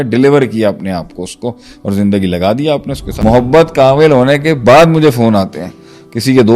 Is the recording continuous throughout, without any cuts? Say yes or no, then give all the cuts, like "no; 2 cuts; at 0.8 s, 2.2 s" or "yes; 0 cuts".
no; 1 cut; at 3.0 s